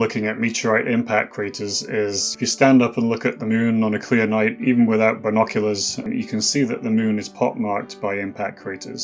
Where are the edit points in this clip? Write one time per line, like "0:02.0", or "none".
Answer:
0:02.3
0:06.0